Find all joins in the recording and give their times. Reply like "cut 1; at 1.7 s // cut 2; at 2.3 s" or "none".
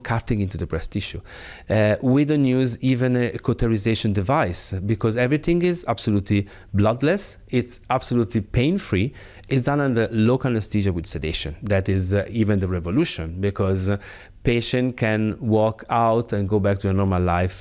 none